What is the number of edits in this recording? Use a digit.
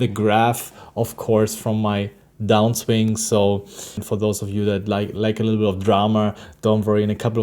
1